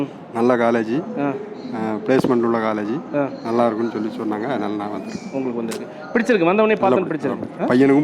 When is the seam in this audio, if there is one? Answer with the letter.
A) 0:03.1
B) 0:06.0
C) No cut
C